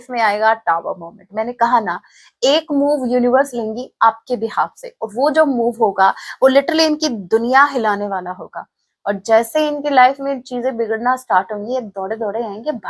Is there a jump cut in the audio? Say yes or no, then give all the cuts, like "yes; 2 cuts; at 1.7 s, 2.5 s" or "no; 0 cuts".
no; 0 cuts